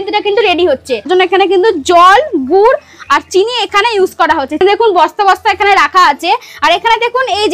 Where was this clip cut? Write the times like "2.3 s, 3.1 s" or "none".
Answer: 1.1 s, 4.6 s